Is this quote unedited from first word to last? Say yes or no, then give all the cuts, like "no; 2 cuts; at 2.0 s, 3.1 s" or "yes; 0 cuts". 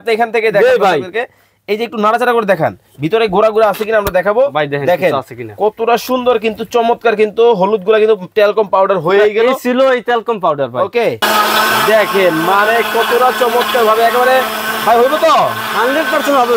no; 1 cut; at 11.2 s